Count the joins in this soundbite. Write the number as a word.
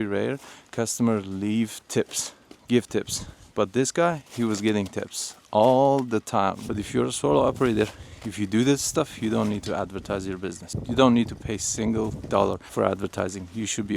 three